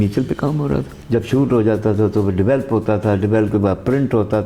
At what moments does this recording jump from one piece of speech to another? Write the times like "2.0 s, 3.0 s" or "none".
0.9 s